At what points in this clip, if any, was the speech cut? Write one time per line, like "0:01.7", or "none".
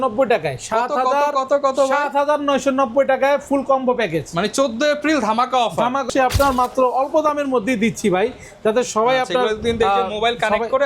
0:06.0